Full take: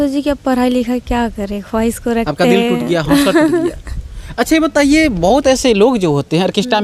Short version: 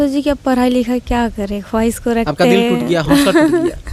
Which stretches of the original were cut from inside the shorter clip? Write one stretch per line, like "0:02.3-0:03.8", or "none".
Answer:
none

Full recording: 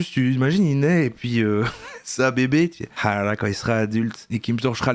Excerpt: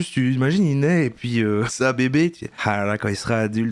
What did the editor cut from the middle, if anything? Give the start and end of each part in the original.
0:01.7-0:02.1

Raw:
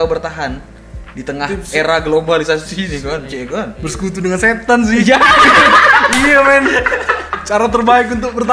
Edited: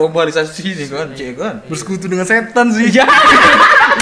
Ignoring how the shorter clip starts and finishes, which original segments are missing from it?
none

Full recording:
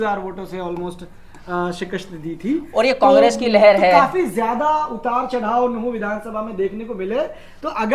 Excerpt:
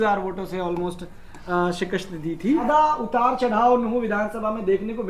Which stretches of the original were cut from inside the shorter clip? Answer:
0:02.6-0:04.6

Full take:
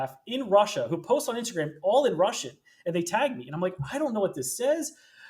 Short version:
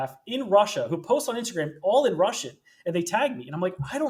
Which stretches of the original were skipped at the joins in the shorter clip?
none

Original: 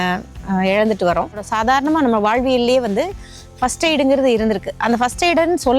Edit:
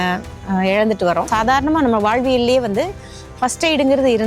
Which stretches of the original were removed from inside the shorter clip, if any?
0:01.3-0:01.5

